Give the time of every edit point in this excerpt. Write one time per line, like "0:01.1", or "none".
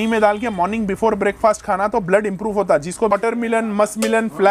0:03.1